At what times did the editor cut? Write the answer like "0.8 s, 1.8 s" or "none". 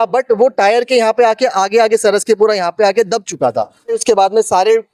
4.0 s